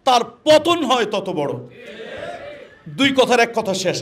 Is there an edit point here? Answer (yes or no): no